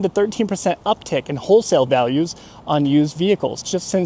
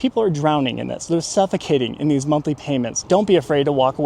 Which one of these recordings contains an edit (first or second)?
second